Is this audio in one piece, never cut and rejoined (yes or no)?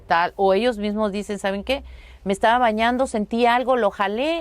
yes